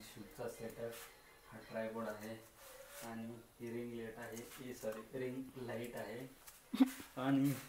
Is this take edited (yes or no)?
no